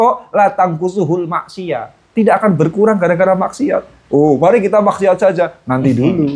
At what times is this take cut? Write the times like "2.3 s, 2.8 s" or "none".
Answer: none